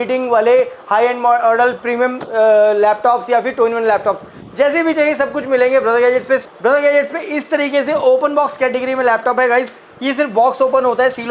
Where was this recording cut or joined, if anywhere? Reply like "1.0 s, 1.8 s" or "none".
6.4 s

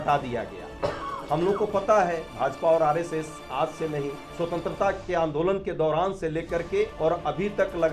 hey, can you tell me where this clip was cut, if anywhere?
4.2 s, 6.9 s

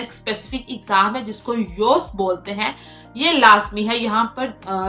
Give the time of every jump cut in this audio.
none

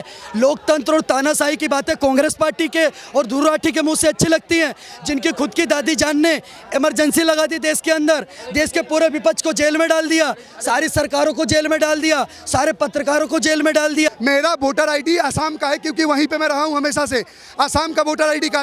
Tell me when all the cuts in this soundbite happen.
14.2 s

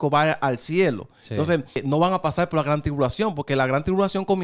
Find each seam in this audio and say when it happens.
1.8 s

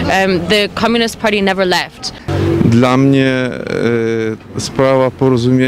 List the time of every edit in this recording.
2.3 s

